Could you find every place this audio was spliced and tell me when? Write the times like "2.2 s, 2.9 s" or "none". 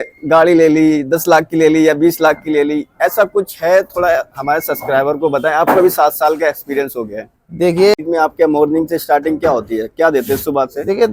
8.0 s